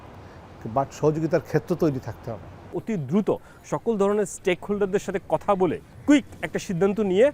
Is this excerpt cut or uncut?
cut